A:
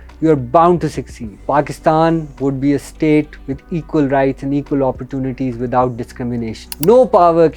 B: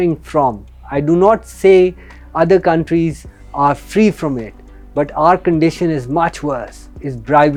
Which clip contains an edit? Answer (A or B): A